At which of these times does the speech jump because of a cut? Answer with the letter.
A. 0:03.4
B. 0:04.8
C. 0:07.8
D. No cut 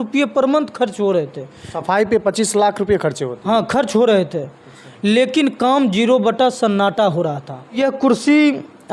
C